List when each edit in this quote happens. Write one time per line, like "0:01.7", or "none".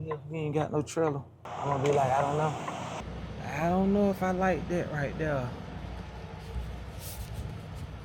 0:01.4
0:03.0